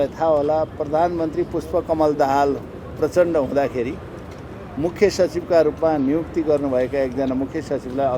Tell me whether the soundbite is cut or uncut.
uncut